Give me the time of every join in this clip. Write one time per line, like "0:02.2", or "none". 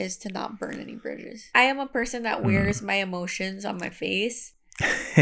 0:01.3